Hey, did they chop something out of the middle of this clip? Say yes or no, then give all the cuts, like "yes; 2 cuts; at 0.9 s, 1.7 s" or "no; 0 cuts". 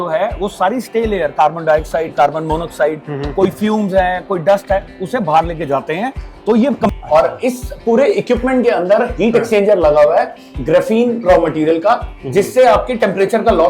yes; 1 cut; at 6.9 s